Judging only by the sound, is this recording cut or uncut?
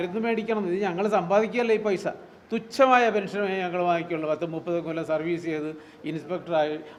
uncut